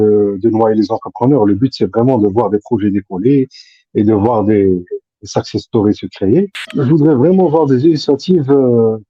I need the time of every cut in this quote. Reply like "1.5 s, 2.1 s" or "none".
6.6 s